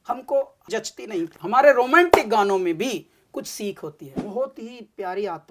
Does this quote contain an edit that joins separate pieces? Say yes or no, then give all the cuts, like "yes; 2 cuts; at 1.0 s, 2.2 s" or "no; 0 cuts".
yes; 2 cuts; at 1.0 s, 4.1 s